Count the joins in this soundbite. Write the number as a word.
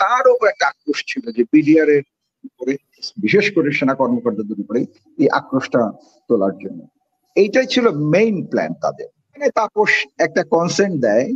one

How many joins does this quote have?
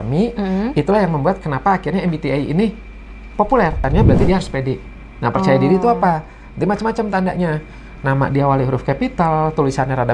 one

